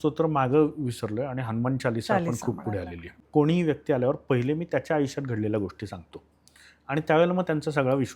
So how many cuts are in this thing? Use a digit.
1